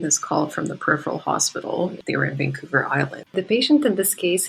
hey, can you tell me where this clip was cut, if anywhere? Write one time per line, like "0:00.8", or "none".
0:02.0
0:03.3